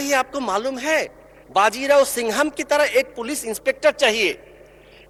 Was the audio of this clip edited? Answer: no; 0 cuts

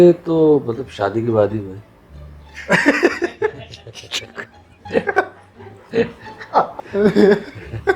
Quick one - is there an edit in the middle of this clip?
yes; 1 cut; at 6.7 s

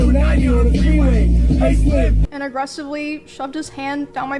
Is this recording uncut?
no; 1 cut; at 2.2 s

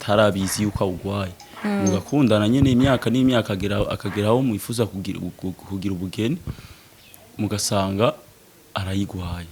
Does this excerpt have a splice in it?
no; 0 cuts

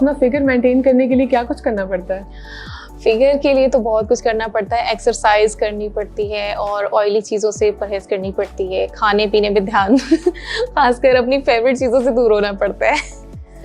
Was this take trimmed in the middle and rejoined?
no; 0 cuts

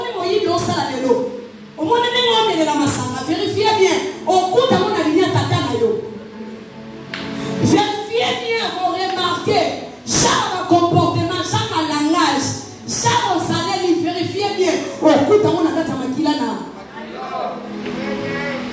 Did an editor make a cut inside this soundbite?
no; 0 cuts

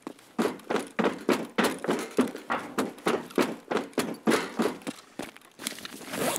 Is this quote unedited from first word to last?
yes; 0 cuts

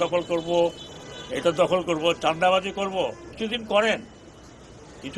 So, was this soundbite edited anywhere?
yes; 1 cut; at 3.2 s

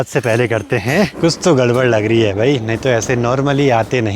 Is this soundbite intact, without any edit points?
no; 1 cut; at 1.2 s

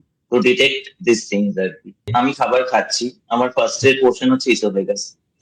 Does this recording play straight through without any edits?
no; 1 cut; at 2.1 s

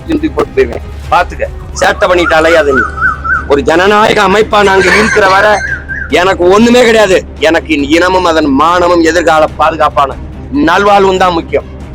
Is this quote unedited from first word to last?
yes; 0 cuts

